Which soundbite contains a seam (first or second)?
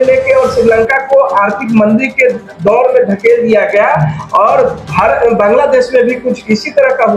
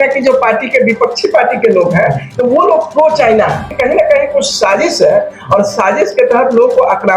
second